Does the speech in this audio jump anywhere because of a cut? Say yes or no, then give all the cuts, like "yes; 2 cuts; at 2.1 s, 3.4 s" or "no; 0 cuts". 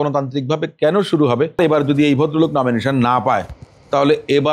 yes; 1 cut; at 1.6 s